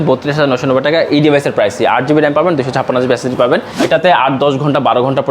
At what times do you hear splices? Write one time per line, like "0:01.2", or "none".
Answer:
0:03.7

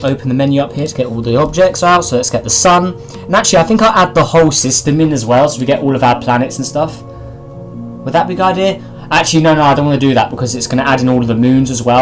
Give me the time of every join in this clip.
0:08.8

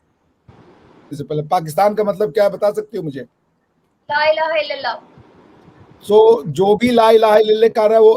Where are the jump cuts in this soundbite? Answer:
0:01.2

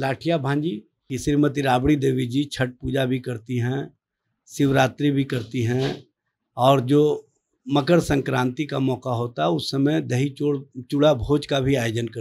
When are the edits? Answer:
0:00.9

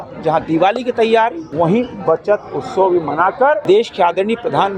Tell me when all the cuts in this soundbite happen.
0:01.4
0:03.6

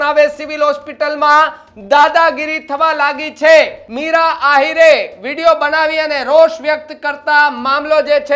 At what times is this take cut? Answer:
0:03.8

